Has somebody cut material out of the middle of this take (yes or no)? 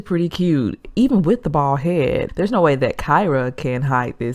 yes